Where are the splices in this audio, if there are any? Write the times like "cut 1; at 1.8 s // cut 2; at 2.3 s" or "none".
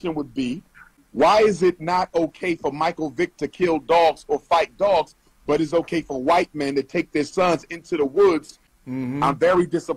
cut 1; at 1.0 s // cut 2; at 8.7 s